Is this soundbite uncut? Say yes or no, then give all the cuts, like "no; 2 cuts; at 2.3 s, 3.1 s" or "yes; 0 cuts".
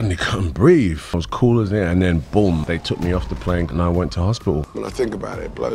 no; 2 cuts; at 1.1 s, 4.7 s